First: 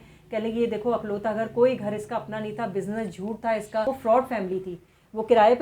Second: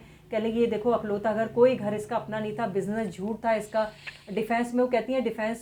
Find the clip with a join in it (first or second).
first